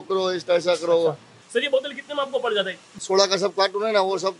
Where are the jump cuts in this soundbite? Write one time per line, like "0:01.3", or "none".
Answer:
0:01.3
0:02.8